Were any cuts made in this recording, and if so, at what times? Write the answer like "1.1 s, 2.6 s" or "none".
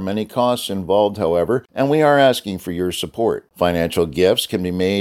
1.7 s